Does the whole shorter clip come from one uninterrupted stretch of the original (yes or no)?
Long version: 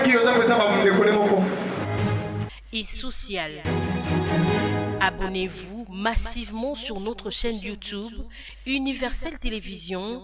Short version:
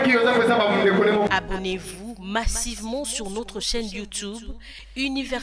no